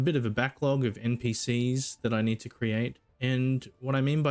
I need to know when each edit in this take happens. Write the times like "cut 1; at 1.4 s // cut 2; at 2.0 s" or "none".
cut 1; at 3.1 s